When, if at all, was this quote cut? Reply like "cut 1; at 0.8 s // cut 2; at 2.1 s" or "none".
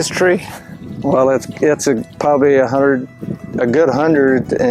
none